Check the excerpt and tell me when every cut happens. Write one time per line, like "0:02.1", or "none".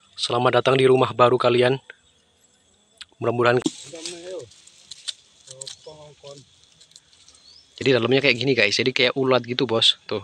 0:03.6

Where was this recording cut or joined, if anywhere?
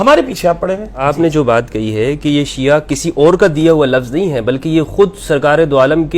0:01.0

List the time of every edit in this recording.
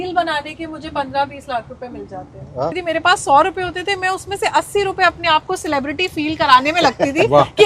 0:02.8

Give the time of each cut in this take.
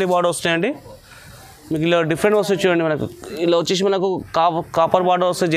none

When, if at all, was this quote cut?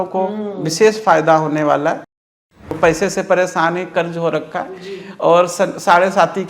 0:02.4

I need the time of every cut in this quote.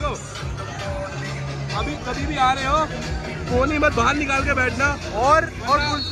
none

